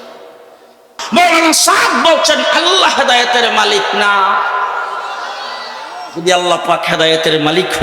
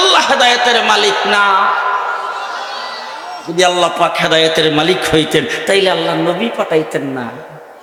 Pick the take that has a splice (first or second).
first